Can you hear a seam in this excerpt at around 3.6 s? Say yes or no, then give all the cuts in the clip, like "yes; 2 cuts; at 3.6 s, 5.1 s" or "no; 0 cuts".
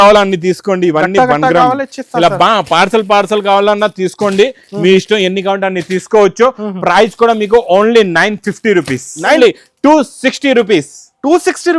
no; 1 cut; at 9.4 s